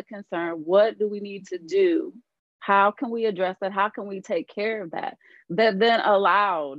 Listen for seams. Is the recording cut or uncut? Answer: uncut